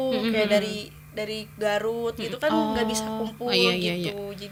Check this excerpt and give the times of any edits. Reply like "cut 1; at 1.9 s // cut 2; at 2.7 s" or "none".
none